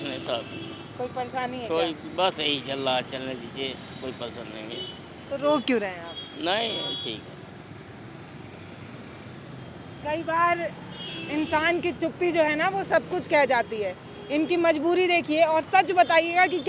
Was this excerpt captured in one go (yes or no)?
yes